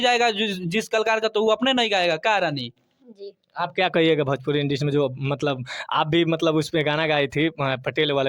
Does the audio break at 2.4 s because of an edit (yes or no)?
no